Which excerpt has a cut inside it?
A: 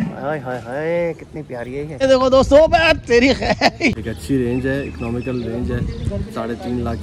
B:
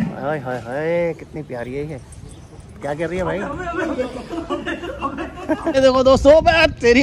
A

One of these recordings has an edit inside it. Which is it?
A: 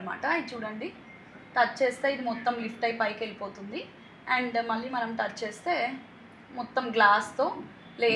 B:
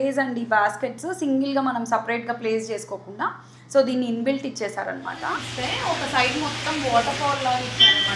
B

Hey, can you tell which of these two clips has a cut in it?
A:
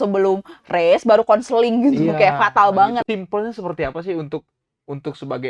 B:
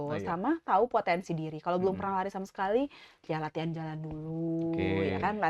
A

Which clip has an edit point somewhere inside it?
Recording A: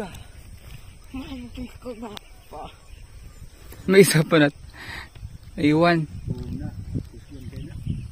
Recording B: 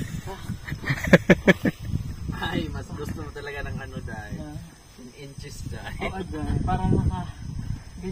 A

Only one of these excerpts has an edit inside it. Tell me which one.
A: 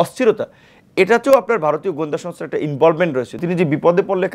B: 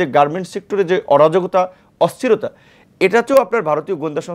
A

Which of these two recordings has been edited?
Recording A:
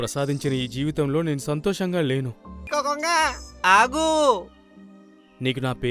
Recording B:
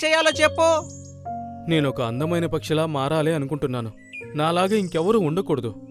A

